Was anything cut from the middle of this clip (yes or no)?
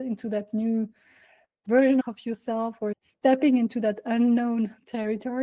no